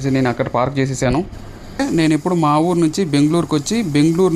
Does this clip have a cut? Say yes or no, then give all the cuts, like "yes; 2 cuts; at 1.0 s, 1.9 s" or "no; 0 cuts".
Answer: yes; 1 cut; at 1.8 s